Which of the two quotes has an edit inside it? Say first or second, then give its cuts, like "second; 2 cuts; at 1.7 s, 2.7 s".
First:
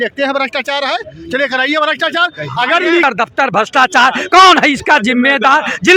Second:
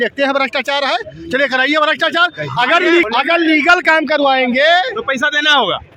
first; 1 cut; at 3.0 s